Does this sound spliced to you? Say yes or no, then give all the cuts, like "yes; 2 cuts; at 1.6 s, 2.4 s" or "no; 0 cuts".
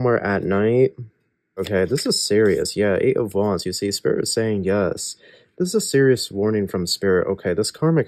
yes; 1 cut; at 1.6 s